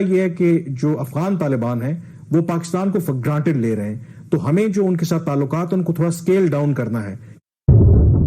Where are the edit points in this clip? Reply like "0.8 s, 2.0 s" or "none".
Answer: 7.3 s